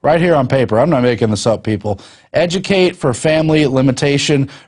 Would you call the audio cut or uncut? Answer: cut